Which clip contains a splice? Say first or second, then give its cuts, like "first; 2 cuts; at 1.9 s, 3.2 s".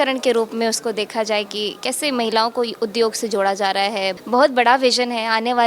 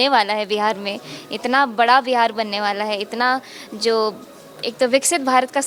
first; 1 cut; at 4.1 s